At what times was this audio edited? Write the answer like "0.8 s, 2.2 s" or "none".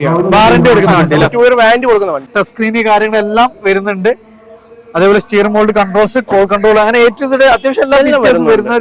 2.4 s